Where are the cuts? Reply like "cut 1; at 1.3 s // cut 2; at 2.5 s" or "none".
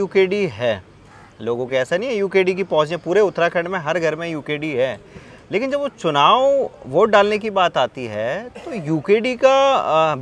none